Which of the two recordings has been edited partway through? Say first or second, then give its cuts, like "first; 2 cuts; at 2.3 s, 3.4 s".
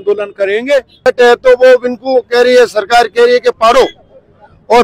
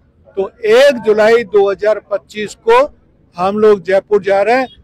first; 1 cut; at 1.1 s